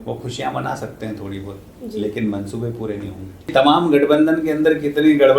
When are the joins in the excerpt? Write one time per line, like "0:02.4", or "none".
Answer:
0:03.5